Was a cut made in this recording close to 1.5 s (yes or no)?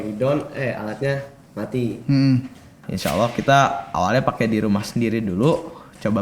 no